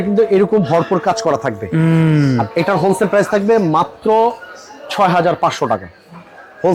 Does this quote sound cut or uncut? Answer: uncut